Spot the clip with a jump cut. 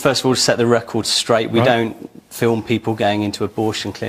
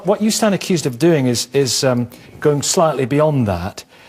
second; 1 cut; at 1.3 s

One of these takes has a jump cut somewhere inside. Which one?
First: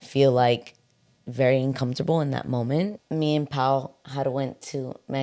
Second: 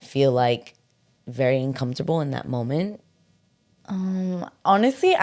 first; 1 cut; at 3.0 s

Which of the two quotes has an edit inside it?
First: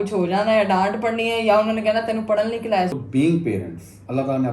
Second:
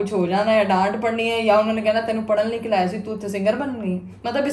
first; 1 cut; at 2.9 s

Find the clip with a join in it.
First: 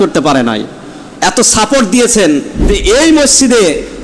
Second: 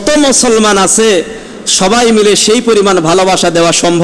first; 1 cut; at 2.7 s

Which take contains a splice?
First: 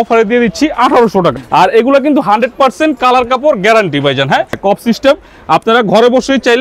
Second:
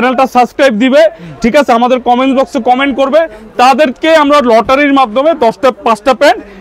first; 2 cuts; at 1.3 s, 4.6 s

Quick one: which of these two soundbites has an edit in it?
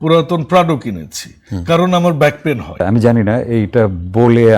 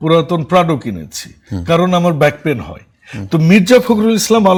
first; 1 cut; at 2.8 s

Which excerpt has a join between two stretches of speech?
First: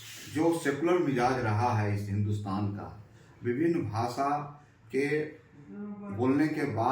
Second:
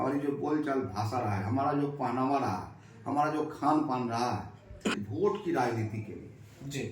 second; 1 cut; at 5.0 s

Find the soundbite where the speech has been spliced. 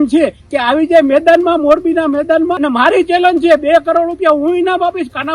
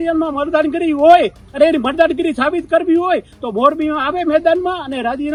first; 1 cut; at 2.5 s

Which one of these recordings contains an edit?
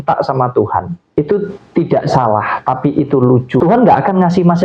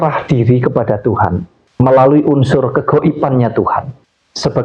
first; 2 cuts; at 1.0 s, 3.6 s

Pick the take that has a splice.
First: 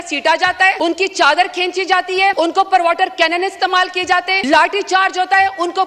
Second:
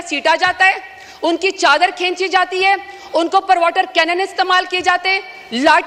first; 3 cuts; at 0.8 s, 2.3 s, 4.4 s

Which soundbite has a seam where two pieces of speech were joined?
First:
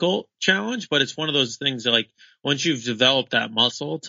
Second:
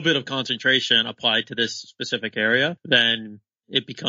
second; 1 cut; at 3.2 s

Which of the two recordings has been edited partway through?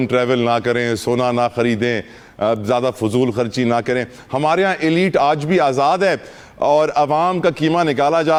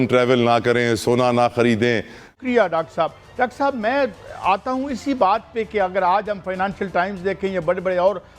second; 1 cut; at 2.3 s

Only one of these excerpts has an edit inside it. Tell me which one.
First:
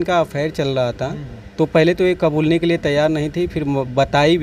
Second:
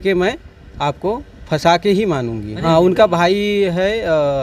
second; 1 cut; at 2.5 s

